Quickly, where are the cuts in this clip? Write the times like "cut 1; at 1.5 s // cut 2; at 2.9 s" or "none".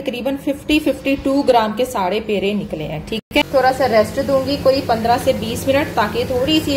cut 1; at 3.2 s